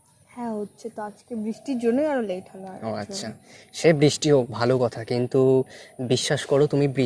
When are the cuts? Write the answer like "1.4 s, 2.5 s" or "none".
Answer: none